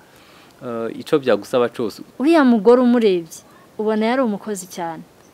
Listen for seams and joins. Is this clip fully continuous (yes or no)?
no